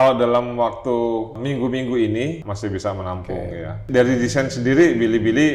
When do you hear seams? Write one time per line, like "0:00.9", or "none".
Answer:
0:01.4
0:02.5
0:03.8